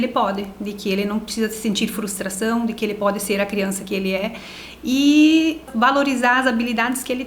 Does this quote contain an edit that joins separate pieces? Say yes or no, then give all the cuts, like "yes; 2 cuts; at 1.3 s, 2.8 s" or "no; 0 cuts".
yes; 1 cut; at 5.7 s